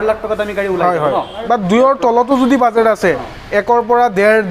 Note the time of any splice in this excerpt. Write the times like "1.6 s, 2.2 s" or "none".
1.4 s